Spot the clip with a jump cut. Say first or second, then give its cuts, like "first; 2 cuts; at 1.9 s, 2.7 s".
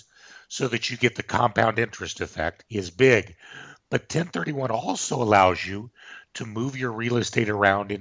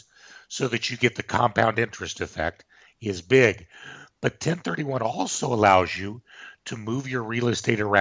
first; 1 cut; at 2.6 s